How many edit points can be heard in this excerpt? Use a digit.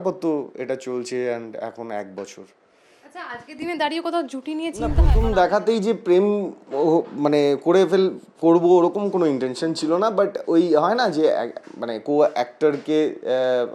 1